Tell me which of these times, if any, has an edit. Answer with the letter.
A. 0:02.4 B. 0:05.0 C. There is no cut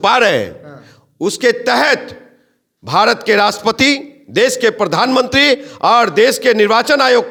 C